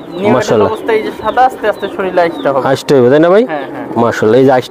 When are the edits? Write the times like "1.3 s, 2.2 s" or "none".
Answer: none